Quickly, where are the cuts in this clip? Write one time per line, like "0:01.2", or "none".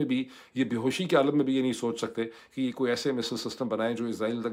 none